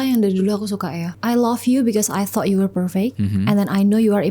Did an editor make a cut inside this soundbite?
yes; 2 cuts; at 1.1 s, 3.2 s

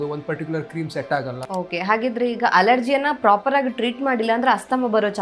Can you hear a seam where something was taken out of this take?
yes; 1 cut; at 1.4 s

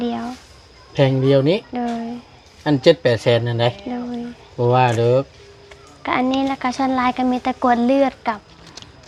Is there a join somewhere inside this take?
no; 0 cuts

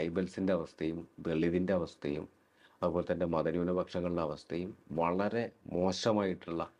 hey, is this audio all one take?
yes; 0 cuts

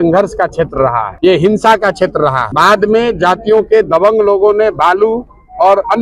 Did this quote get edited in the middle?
yes; 2 cuts; at 1.1 s, 2.4 s

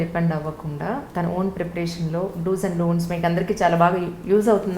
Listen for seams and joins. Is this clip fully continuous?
no; 1 cut; at 1.1 s

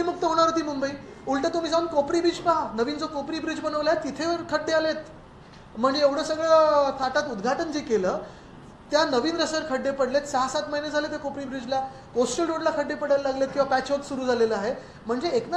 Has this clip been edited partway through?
no; 0 cuts

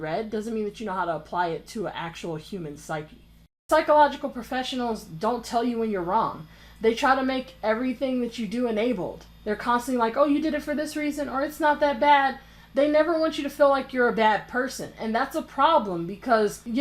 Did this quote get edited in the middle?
yes; 1 cut; at 3.5 s

